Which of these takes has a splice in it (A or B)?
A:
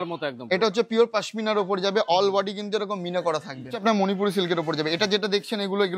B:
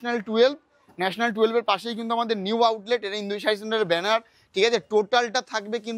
A